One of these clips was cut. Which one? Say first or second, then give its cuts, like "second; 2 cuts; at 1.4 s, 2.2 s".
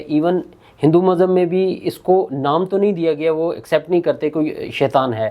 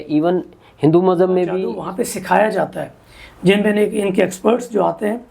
second; 1 cut; at 1.7 s